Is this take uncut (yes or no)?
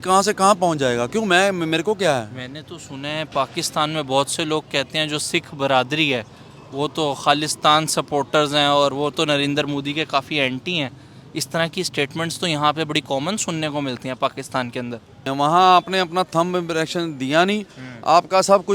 no